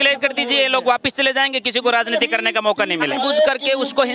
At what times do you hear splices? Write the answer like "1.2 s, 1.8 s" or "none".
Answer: 3.1 s